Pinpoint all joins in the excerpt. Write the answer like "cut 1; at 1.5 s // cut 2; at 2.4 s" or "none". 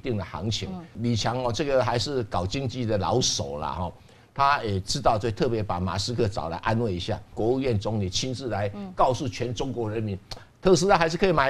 cut 1; at 0.9 s // cut 2; at 7.3 s